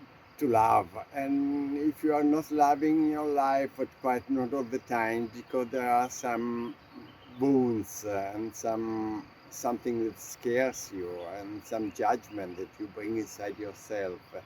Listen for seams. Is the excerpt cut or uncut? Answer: uncut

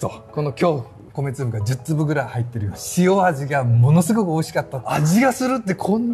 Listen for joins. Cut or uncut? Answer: cut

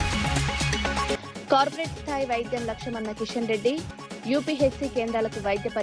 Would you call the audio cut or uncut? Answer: cut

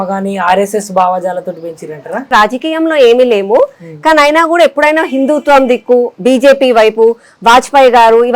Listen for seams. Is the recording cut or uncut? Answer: cut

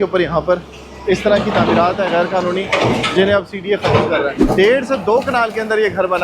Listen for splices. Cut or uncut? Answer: cut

